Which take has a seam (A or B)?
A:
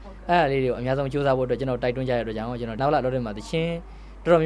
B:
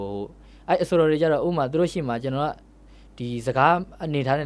A